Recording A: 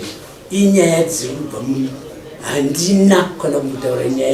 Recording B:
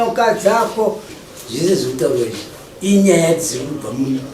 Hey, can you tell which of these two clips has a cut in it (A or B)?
B